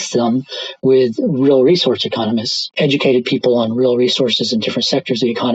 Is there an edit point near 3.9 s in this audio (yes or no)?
no